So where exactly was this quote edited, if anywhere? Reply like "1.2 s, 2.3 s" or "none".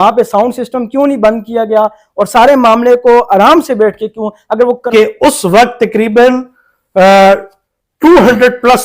4.8 s